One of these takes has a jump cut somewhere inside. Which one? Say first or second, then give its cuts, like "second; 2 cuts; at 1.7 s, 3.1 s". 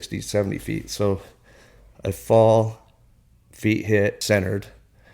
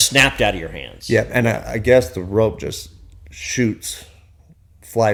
first; 1 cut; at 4.2 s